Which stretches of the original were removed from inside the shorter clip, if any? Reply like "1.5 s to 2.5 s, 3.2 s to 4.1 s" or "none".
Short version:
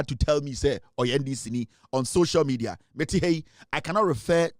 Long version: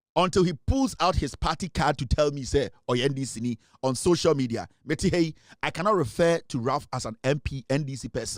none